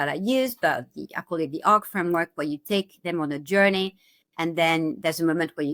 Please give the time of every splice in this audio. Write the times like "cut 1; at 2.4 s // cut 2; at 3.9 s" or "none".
none